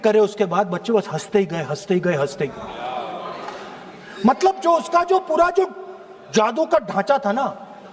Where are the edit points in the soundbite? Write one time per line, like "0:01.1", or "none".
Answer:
none